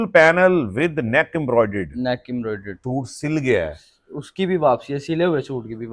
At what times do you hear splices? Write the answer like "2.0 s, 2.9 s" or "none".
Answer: 2.7 s